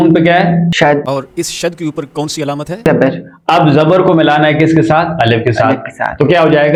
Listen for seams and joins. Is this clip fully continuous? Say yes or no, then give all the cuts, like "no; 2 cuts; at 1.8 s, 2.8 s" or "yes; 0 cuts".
yes; 0 cuts